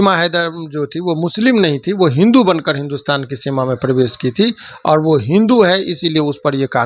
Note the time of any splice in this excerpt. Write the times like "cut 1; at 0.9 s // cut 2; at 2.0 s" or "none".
none